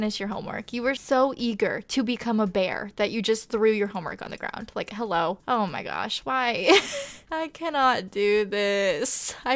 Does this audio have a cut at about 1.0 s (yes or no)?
yes